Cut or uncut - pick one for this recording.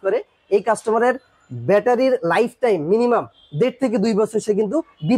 uncut